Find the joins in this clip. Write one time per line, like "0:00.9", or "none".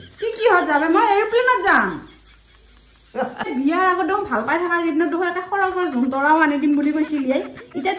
0:03.5